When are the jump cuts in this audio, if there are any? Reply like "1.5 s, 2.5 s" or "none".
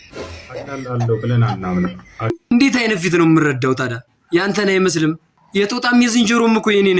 2.4 s